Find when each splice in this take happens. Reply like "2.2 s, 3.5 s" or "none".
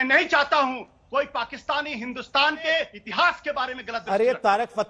3.0 s